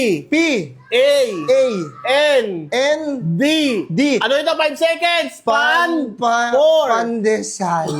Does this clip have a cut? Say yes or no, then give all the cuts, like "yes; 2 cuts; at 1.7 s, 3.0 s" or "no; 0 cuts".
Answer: no; 0 cuts